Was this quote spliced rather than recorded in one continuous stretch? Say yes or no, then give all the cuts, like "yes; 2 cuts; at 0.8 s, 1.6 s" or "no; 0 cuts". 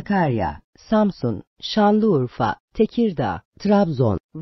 yes; 1 cut; at 3.5 s